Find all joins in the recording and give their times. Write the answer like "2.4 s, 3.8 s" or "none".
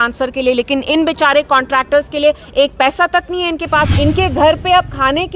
3.9 s